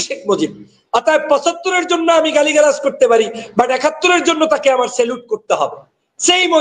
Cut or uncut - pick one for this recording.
uncut